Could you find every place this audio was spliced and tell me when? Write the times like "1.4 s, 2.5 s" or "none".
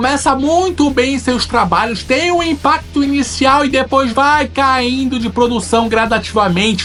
none